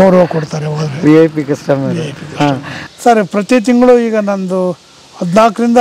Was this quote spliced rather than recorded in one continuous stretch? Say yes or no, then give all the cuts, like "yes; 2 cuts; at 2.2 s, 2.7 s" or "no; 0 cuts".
yes; 1 cut; at 2.7 s